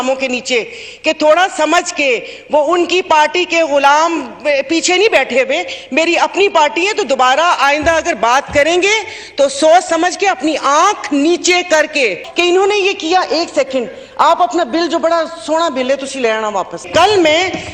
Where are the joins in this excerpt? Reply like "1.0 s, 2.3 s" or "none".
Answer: 12.2 s, 16.9 s